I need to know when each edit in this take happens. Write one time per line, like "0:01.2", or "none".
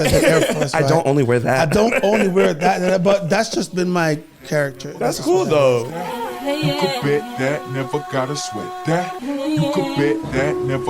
0:06.0